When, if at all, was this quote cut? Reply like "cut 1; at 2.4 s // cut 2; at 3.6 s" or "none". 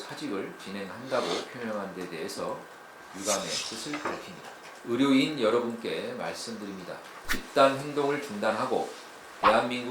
cut 1; at 4.6 s // cut 2; at 7.1 s